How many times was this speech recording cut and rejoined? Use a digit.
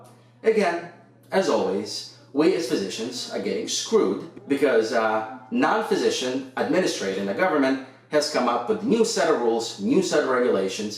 1